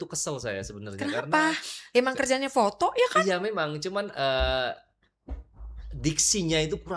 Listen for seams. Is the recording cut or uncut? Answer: uncut